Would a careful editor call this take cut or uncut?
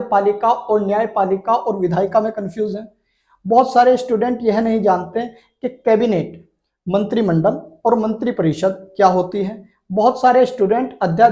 uncut